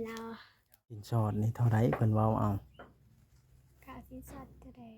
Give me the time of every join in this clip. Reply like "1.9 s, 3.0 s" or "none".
1.0 s